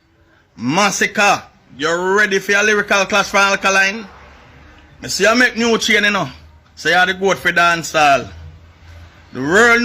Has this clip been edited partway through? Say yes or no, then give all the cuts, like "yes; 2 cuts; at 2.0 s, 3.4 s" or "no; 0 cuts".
no; 0 cuts